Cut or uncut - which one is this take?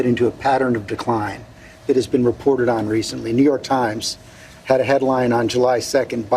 uncut